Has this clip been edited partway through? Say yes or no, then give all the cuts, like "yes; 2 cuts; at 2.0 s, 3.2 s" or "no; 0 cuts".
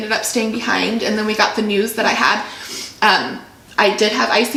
no; 0 cuts